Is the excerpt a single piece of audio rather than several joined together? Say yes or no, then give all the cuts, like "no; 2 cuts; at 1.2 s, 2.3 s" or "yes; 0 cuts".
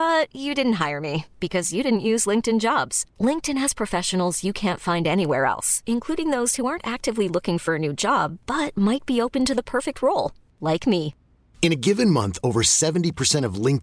yes; 0 cuts